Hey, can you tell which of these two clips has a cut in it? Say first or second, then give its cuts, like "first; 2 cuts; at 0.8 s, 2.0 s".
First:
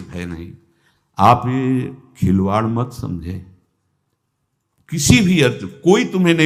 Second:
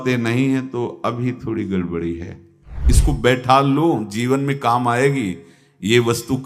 second; 1 cut; at 2.9 s